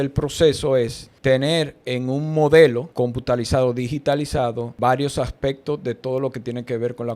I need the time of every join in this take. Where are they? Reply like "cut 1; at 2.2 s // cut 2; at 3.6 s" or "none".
cut 1; at 1.0 s // cut 2; at 2.9 s // cut 3; at 4.7 s